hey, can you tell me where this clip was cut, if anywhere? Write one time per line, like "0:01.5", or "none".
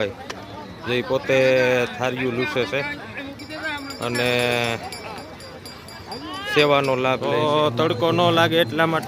0:07.3